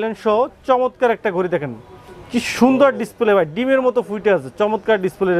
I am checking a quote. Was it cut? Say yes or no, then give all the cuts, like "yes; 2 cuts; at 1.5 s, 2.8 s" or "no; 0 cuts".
no; 0 cuts